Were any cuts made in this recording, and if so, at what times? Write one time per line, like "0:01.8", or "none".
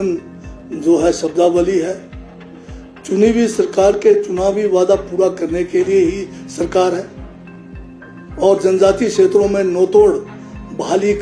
none